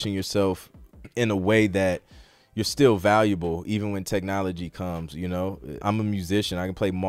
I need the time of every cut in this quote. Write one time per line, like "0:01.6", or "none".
0:05.7